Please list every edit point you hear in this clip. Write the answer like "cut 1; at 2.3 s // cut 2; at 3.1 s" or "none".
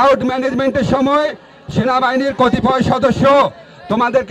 none